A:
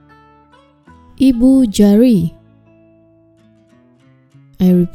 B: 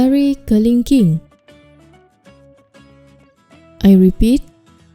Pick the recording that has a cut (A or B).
B